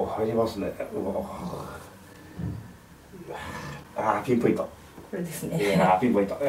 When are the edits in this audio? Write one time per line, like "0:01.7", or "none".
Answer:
none